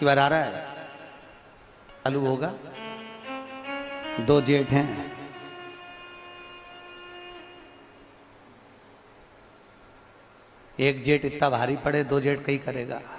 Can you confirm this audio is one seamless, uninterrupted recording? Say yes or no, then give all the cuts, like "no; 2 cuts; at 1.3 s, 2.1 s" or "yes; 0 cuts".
no; 1 cut; at 2.1 s